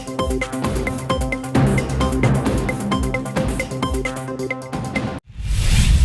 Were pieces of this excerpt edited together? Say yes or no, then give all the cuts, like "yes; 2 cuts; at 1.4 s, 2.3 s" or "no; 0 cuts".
yes; 1 cut; at 5.1 s